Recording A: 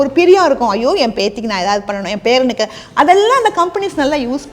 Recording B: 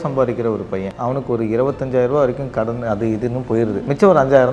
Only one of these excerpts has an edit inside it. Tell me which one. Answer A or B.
B